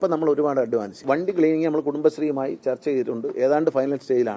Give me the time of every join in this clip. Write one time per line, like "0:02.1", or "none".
0:01.0